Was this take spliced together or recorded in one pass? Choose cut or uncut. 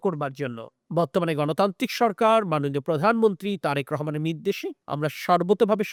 uncut